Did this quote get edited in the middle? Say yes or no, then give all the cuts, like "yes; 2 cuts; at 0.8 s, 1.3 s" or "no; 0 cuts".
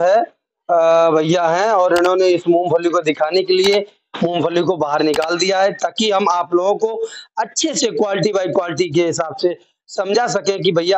no; 0 cuts